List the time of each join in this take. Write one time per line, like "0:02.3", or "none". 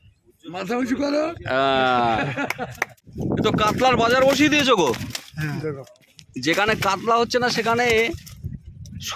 0:03.1